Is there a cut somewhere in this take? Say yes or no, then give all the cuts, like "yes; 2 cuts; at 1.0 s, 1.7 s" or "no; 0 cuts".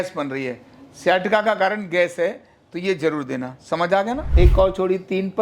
yes; 1 cut; at 4.2 s